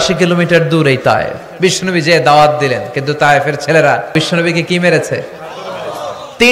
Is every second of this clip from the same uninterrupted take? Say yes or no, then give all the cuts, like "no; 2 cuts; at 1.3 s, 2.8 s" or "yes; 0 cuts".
no; 2 cuts; at 1.4 s, 4.1 s